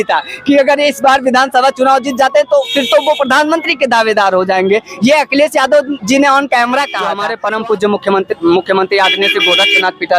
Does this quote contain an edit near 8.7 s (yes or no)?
no